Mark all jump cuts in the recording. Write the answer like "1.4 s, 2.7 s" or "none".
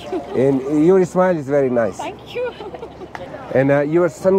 3.3 s